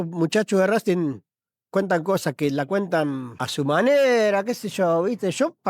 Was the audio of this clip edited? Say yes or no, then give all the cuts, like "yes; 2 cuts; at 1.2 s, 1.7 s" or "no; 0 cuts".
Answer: yes; 1 cut; at 3.4 s